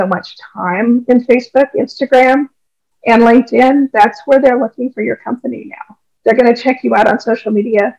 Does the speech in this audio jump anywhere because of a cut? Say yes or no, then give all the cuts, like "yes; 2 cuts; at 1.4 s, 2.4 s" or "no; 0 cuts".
no; 0 cuts